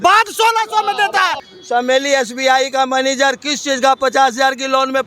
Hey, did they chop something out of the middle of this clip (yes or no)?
yes